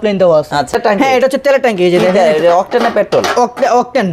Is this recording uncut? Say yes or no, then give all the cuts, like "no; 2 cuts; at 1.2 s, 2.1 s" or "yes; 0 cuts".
no; 1 cut; at 1.0 s